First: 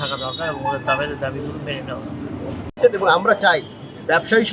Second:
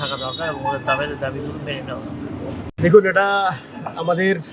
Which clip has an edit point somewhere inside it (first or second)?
first